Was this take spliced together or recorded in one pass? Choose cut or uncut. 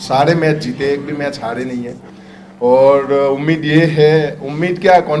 uncut